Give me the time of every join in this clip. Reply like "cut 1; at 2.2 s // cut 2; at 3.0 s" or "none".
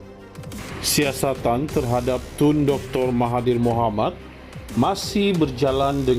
cut 1; at 0.9 s